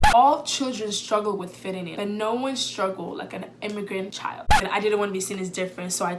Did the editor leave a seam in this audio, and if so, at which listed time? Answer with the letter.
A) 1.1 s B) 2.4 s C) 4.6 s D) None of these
C